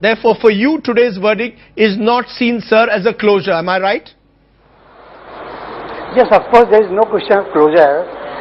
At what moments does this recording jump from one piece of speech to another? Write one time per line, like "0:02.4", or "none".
none